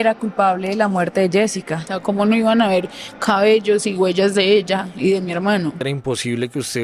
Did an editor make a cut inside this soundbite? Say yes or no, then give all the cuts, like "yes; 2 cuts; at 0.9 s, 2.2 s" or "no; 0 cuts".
yes; 2 cuts; at 1.9 s, 5.8 s